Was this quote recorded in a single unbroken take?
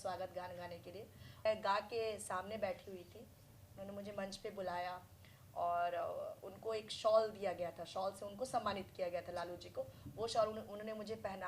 no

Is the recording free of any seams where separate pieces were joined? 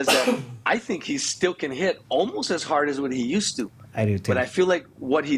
yes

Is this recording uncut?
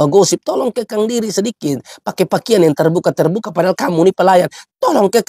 yes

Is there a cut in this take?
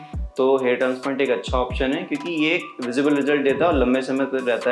no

